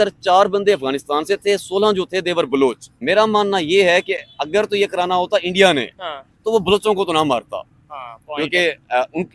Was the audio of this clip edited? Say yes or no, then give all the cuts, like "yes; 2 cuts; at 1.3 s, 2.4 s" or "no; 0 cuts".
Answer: yes; 1 cut; at 2.9 s